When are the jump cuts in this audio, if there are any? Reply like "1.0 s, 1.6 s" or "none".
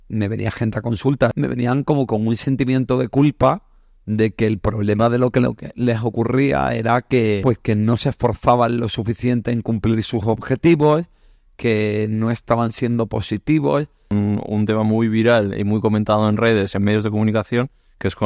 1.3 s, 7.4 s, 14.1 s